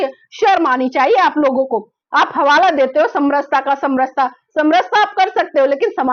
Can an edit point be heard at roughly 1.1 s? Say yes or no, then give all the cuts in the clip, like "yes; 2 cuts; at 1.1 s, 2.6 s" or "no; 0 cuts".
no; 0 cuts